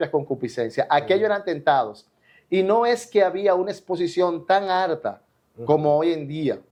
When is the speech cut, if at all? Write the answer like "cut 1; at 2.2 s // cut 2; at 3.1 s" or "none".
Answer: none